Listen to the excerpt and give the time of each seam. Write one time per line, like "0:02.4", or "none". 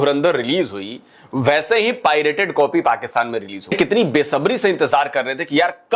0:03.7